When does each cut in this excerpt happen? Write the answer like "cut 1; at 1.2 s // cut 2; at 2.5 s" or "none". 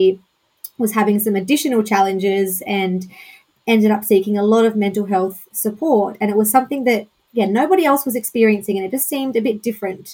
none